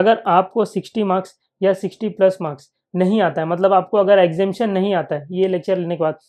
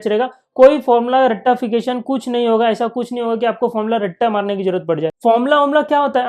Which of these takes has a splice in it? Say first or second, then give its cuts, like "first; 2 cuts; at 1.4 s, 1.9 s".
second; 1 cut; at 5.2 s